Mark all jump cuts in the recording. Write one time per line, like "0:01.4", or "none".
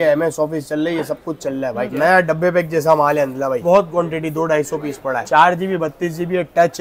0:01.9
0:03.6
0:05.2